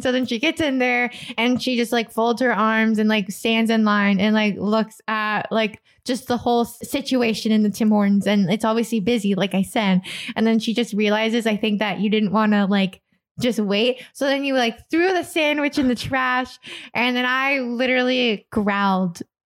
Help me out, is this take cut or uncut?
cut